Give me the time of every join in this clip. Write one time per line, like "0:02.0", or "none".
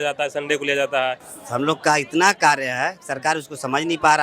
0:01.3